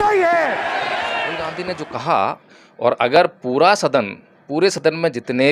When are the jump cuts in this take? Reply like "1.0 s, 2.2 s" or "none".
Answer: 1.4 s